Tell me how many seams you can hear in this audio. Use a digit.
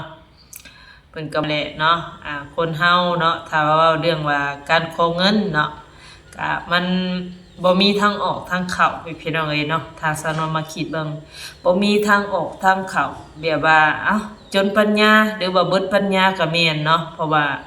1